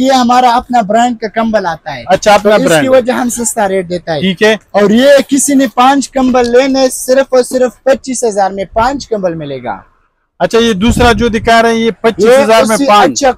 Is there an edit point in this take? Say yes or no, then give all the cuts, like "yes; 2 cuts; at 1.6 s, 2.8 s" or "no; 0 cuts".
no; 0 cuts